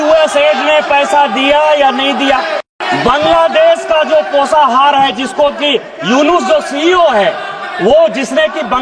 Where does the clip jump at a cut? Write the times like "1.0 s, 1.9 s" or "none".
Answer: 2.7 s